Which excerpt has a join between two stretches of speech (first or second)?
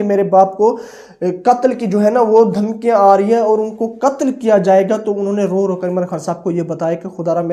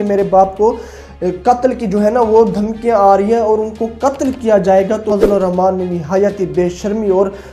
second